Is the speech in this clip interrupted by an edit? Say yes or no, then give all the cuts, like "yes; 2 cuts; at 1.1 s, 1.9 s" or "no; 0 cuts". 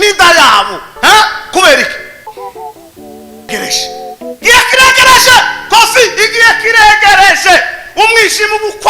yes; 2 cuts; at 2.2 s, 3.5 s